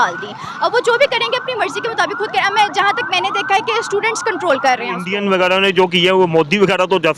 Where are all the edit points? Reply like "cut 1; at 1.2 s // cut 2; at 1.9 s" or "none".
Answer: cut 1; at 5.1 s